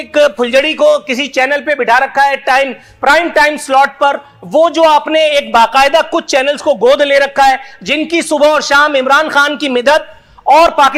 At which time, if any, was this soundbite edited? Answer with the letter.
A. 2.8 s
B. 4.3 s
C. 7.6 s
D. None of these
D